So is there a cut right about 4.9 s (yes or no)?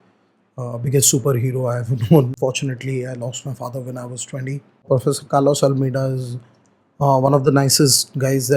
yes